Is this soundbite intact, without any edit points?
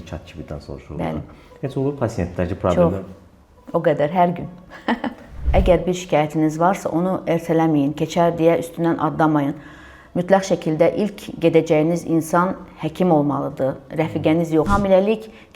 no; 2 cuts; at 5.4 s, 14.7 s

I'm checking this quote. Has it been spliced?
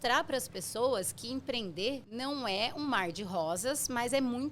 yes; 1 cut; at 2.1 s

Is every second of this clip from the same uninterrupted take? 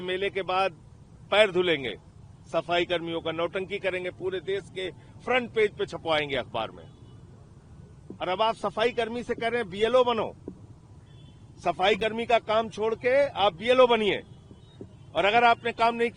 yes; 0 cuts

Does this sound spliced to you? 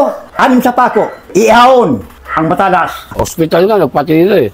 yes; 3 cuts; at 1.3 s, 2.2 s, 3.0 s

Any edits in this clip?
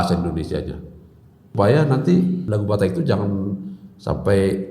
yes; 2 cuts; at 1.5 s, 2.4 s

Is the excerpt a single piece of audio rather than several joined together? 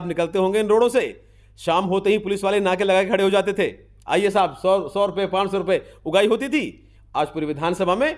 yes; 0 cuts

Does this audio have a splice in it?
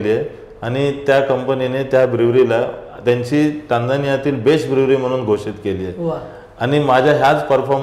no; 0 cuts

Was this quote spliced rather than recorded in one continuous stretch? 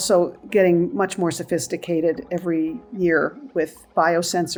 no; 0 cuts

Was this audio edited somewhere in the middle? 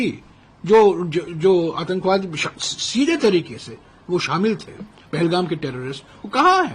no; 0 cuts

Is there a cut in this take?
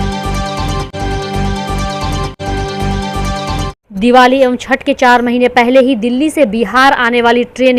no; 0 cuts

